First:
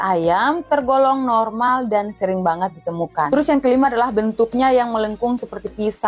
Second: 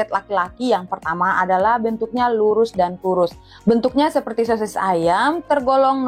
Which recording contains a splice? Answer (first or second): first